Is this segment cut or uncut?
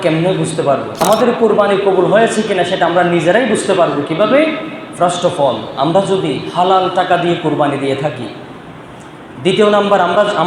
cut